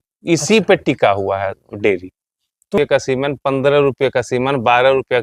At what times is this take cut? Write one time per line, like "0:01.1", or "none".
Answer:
0:02.7